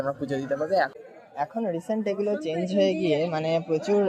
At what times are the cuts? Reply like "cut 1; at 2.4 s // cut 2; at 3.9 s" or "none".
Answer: cut 1; at 0.9 s